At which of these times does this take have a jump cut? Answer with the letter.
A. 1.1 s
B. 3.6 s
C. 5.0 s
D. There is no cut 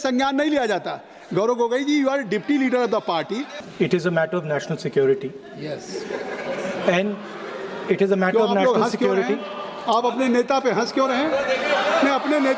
B